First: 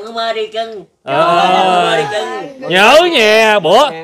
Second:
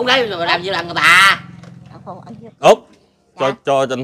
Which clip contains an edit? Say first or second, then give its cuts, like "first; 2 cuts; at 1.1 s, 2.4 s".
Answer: second; 1 cut; at 2.5 s